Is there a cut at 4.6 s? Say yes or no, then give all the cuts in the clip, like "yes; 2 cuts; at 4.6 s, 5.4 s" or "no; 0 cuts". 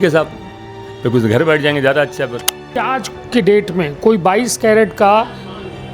no; 1 cut; at 2.9 s